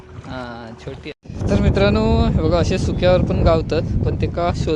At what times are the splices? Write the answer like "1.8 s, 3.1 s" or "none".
1.2 s